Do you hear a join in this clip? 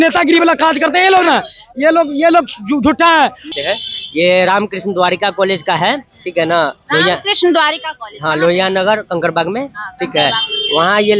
yes; 1 cut; at 3.4 s

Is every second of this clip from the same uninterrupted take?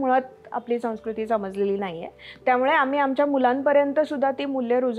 yes; 0 cuts

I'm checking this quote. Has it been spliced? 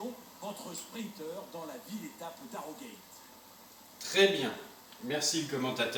no; 0 cuts

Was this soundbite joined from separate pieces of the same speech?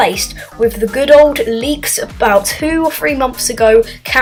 no; 0 cuts

